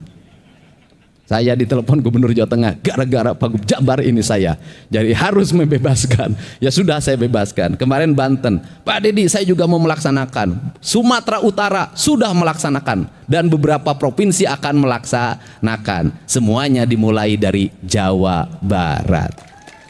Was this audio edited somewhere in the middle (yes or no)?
no